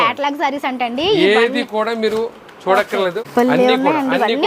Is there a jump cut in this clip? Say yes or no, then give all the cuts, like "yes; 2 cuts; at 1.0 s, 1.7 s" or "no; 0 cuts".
yes; 1 cut; at 3.2 s